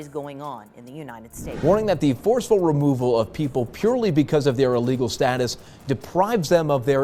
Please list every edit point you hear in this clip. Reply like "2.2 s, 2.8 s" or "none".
1.6 s